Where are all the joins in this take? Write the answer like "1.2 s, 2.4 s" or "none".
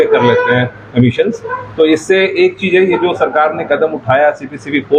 none